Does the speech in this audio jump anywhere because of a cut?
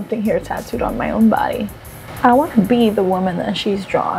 no; 0 cuts

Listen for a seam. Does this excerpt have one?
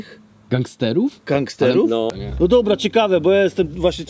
yes; 1 cut; at 2.2 s

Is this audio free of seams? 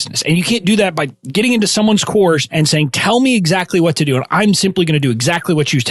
no; 2 cuts; at 1.1 s, 2.5 s

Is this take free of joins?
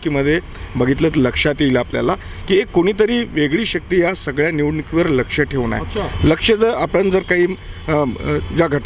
yes; 0 cuts

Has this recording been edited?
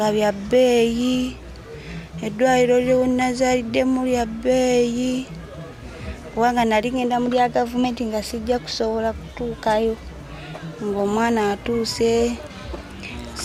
no; 0 cuts

